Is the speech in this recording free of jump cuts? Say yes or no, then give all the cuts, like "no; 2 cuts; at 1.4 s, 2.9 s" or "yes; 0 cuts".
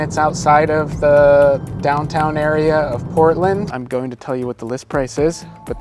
no; 1 cut; at 3.8 s